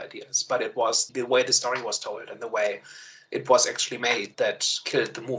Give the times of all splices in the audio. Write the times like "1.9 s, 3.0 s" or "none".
1.0 s, 4.3 s